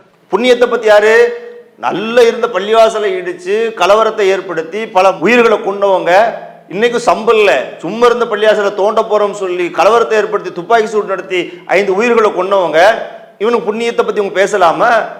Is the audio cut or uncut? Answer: uncut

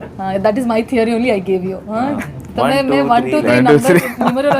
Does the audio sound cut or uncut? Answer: cut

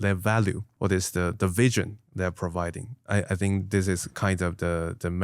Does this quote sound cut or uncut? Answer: cut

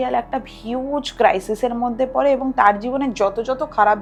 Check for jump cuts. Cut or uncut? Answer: uncut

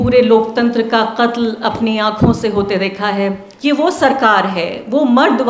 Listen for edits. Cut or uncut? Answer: cut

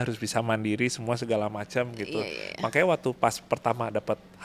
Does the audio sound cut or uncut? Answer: uncut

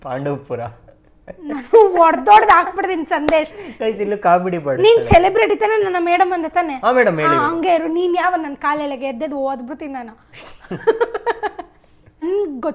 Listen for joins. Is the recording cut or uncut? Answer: uncut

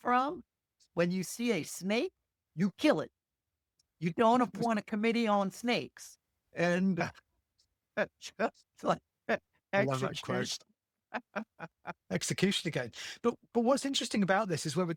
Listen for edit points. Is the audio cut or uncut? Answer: uncut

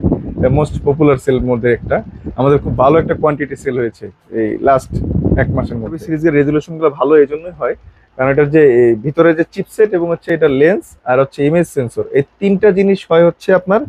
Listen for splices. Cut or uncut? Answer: cut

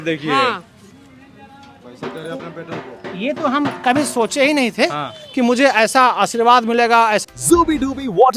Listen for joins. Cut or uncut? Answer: uncut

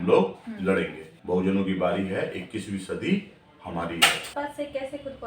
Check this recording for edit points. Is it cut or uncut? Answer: cut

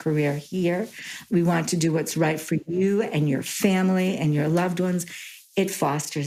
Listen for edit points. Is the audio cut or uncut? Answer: uncut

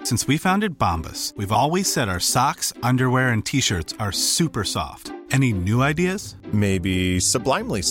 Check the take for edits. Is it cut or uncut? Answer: uncut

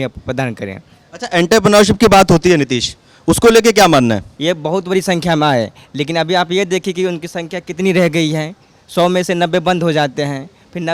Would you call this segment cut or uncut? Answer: cut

